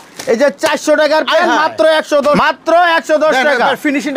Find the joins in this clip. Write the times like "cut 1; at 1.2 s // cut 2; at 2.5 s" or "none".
cut 1; at 2.4 s